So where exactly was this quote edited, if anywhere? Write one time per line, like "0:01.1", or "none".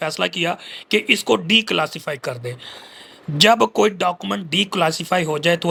none